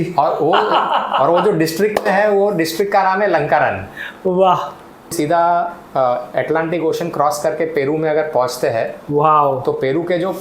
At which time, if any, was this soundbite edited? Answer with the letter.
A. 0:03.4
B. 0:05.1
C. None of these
B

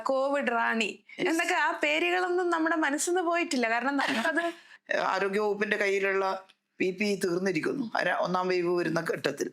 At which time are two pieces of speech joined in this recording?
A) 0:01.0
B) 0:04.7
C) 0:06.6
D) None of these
B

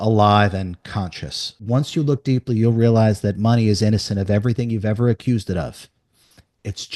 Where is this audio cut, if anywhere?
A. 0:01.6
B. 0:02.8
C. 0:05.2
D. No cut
A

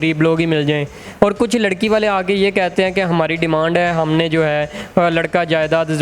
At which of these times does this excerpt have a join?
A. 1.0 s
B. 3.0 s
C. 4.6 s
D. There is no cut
A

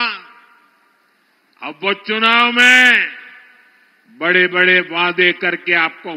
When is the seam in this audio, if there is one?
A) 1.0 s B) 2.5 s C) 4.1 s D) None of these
D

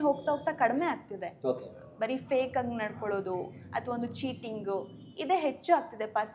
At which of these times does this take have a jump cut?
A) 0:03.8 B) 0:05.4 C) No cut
C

